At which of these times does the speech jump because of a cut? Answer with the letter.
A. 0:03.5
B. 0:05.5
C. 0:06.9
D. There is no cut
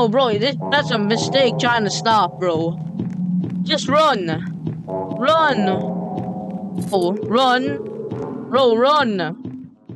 C